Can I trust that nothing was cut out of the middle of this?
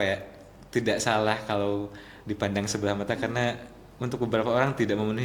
yes; 0 cuts

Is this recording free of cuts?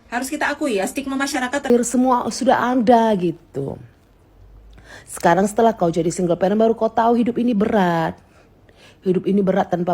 no; 1 cut; at 1.7 s

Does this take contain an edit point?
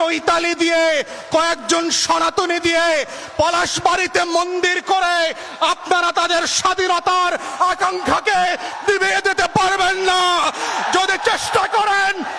no; 0 cuts

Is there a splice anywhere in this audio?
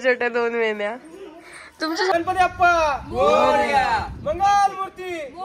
yes; 1 cut; at 2.1 s

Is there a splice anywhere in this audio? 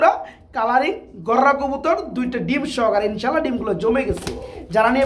no; 0 cuts

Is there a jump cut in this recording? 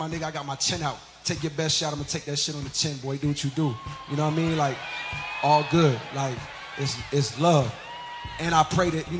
yes; 1 cut; at 3.3 s

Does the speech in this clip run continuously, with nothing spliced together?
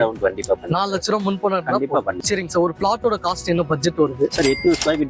yes; 0 cuts

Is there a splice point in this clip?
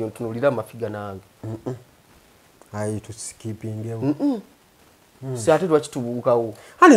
no; 0 cuts

